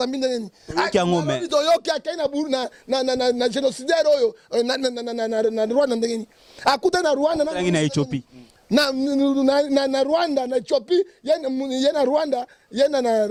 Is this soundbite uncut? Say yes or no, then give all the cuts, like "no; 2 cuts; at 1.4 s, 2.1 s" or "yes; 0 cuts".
yes; 0 cuts